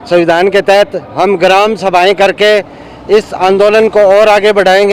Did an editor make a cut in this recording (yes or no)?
no